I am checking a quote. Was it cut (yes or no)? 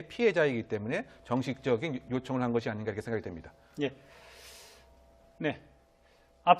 yes